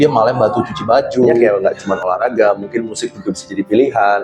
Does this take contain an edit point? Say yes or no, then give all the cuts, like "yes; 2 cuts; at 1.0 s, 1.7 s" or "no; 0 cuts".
yes; 1 cut; at 1.4 s